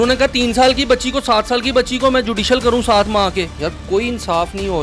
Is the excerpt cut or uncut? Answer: cut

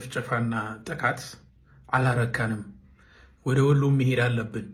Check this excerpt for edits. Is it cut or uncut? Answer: uncut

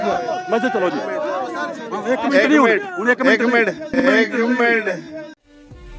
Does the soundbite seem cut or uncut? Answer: uncut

